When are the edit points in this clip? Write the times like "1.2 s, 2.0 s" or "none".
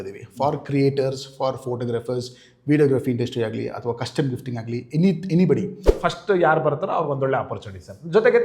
5.9 s